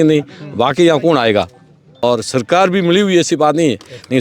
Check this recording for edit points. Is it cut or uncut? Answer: cut